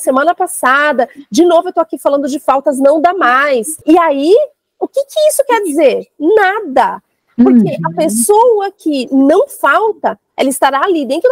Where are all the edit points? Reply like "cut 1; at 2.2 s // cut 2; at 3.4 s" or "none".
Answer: cut 1; at 3.7 s